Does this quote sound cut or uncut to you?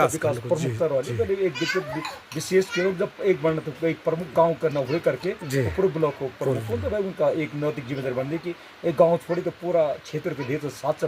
uncut